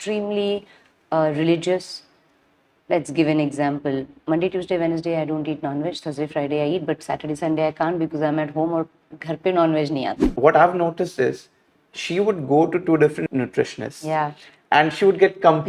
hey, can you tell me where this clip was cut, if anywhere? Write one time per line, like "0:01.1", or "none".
0:10.3
0:13.3